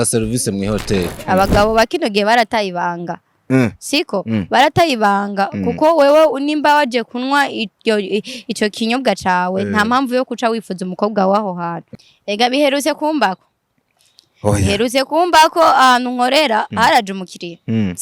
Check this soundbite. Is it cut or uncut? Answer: cut